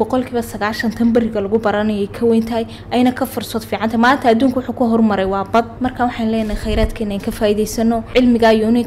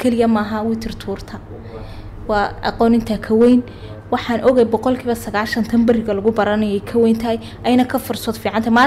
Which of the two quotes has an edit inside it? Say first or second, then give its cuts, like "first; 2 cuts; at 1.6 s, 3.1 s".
first; 2 cuts; at 5.7 s, 8.0 s